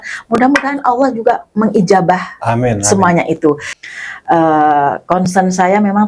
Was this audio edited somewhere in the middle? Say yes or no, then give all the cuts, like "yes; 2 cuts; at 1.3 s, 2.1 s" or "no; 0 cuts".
yes; 1 cut; at 3.7 s